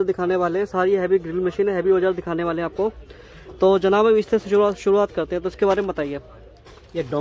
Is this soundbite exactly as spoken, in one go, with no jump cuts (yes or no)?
yes